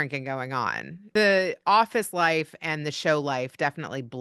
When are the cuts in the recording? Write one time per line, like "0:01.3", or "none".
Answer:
0:01.1